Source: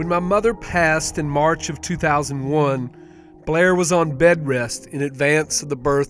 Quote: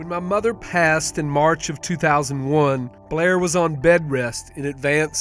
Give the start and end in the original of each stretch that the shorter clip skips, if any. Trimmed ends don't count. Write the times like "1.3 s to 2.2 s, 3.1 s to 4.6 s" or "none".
3.0 s to 3.3 s